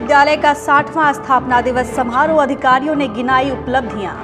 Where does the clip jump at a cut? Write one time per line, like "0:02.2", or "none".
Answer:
none

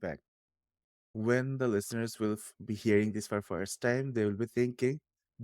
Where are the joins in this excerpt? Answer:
0:01.1

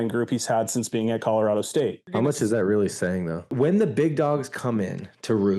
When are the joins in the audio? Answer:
0:02.0
0:03.4

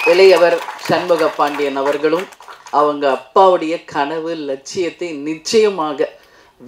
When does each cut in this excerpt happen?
none

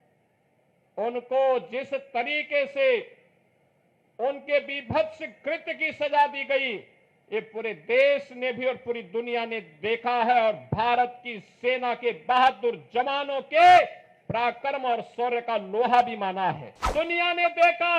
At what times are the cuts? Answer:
0:16.7

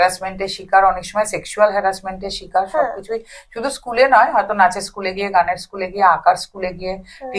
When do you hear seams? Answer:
none

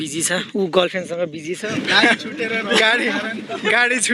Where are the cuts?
0:01.7

